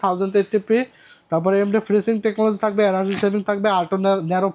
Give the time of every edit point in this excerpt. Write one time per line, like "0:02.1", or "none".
none